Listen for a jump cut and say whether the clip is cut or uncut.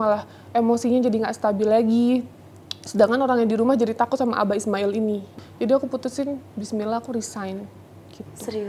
cut